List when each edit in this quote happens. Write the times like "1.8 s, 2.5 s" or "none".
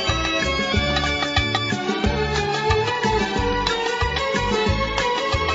none